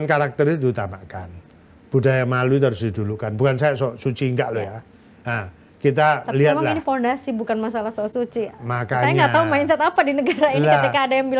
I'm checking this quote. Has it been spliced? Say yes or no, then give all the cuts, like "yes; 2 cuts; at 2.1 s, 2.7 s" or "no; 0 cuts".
no; 0 cuts